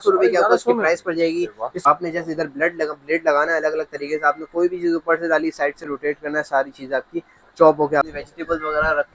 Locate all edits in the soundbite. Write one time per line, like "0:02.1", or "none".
0:01.9
0:08.1